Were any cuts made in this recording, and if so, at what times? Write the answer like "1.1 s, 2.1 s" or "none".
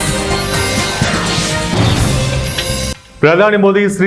3.0 s